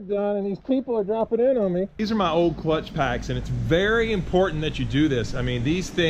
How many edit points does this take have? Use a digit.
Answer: 1